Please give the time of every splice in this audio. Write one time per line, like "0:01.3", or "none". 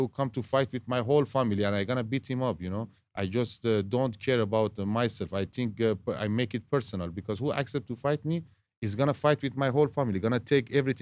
none